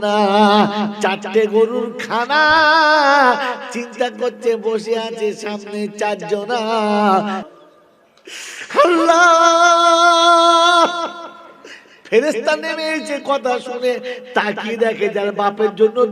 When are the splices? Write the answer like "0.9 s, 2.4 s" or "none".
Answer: 7.4 s